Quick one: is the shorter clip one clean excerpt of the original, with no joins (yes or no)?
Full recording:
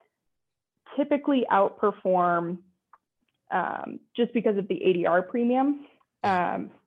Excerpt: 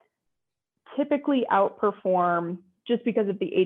no